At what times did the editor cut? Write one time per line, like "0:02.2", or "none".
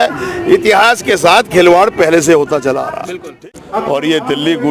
0:03.2